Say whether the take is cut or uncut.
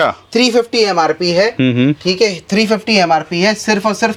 uncut